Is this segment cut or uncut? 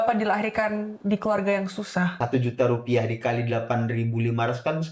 cut